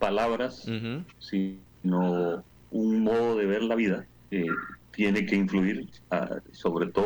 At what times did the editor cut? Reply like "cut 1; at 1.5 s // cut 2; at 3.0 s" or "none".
cut 1; at 1.2 s // cut 2; at 4.3 s // cut 3; at 5.9 s